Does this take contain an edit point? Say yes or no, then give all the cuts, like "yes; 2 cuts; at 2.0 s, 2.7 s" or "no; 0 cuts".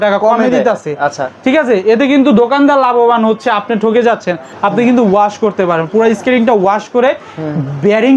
yes; 1 cut; at 4.5 s